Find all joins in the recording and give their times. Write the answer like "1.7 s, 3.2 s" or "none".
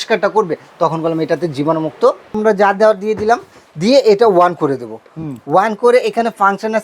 2.4 s